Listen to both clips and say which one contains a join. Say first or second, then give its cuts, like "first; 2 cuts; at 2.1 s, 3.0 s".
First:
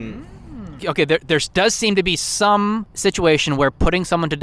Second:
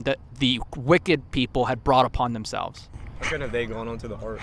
first; 2 cuts; at 0.8 s, 2.9 s